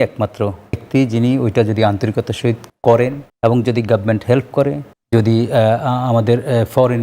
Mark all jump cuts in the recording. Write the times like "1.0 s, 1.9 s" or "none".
0.8 s, 2.7 s, 3.2 s, 4.9 s